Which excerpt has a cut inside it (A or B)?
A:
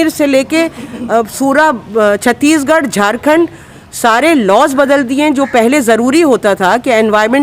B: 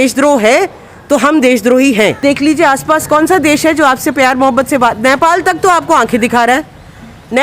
B